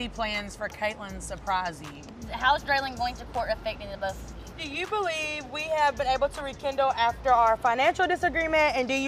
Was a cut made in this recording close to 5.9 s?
no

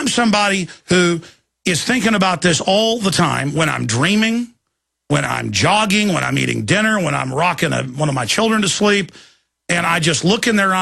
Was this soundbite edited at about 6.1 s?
no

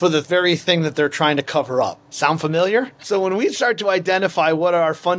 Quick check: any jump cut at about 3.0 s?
yes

